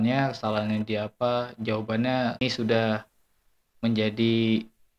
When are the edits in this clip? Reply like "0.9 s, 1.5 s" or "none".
2.4 s